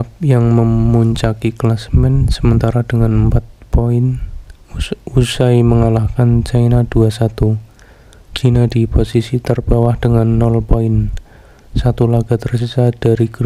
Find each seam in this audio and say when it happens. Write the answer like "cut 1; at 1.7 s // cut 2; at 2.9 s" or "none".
none